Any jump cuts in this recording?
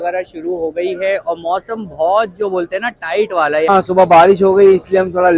yes; 1 cut; at 3.7 s

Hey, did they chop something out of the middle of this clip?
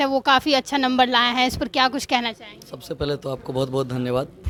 no; 0 cuts

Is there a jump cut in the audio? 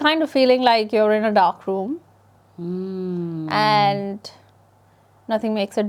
no; 0 cuts

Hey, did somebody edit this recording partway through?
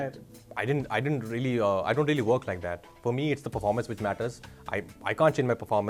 no; 0 cuts

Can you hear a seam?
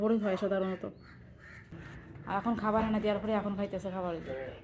yes; 1 cut; at 1.6 s

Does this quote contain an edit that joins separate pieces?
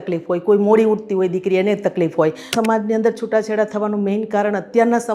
yes; 1 cut; at 2.5 s

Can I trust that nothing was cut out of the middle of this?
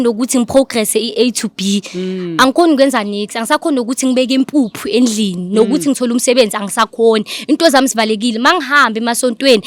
yes; 0 cuts

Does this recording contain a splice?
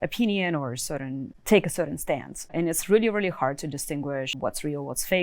yes; 3 cuts; at 1.3 s, 2.5 s, 4.3 s

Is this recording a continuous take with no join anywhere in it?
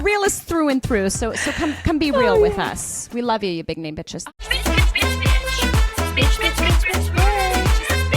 no; 1 cut; at 4.1 s

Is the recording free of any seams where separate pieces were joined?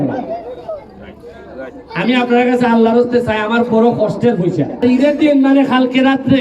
no; 1 cut; at 4.8 s

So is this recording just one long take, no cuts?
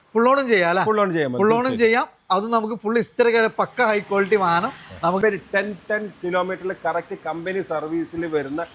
no; 1 cut; at 5.2 s

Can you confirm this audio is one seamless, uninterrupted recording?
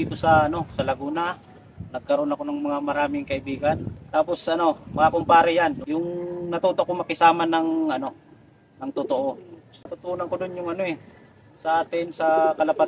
no; 2 cuts; at 3.9 s, 5.8 s

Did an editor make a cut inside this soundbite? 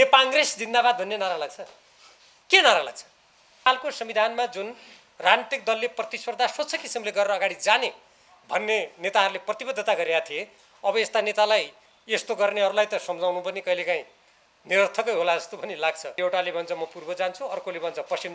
yes; 2 cuts; at 3.7 s, 16.1 s

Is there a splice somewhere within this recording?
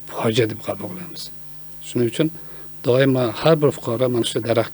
no; 0 cuts

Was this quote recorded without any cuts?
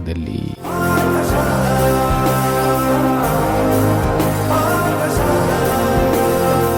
yes; 0 cuts

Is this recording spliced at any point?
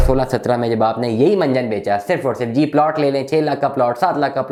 no; 0 cuts

